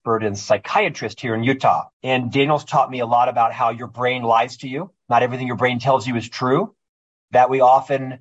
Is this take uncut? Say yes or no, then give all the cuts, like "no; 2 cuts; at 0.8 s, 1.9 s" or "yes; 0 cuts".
no; 1 cut; at 1.9 s